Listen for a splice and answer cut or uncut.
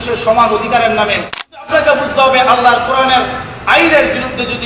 cut